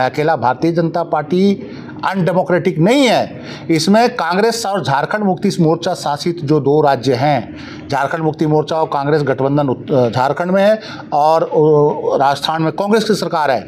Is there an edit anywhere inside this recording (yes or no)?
no